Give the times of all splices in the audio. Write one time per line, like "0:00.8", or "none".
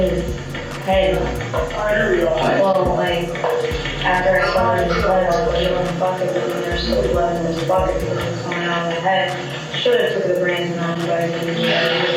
none